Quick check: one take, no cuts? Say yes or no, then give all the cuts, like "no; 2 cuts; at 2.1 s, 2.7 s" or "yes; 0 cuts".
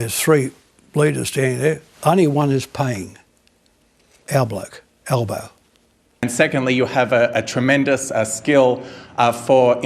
no; 1 cut; at 6.2 s